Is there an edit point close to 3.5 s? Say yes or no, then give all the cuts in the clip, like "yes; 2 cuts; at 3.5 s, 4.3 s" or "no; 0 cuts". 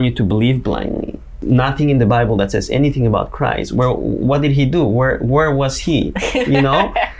no; 1 cut; at 1.3 s